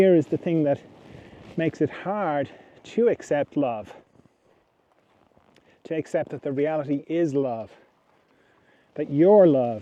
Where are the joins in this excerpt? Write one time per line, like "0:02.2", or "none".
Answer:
none